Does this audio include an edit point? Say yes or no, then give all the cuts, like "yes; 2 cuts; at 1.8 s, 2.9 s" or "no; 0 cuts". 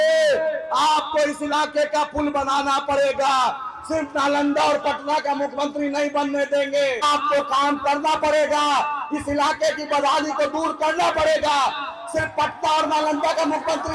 yes; 1 cut; at 7.0 s